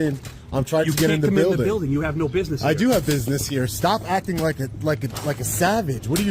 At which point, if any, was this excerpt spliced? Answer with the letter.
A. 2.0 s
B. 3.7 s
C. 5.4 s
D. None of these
B